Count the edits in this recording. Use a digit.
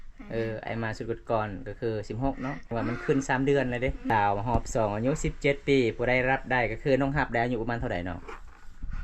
2